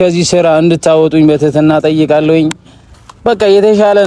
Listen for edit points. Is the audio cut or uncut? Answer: uncut